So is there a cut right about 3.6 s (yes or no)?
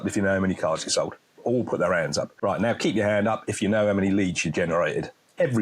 no